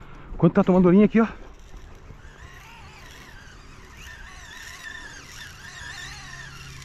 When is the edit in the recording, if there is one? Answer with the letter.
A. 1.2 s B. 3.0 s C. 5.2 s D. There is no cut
D